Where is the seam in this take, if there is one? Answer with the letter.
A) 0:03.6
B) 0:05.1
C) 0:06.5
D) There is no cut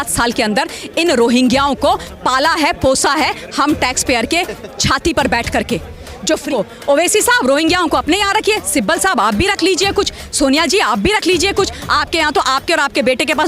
C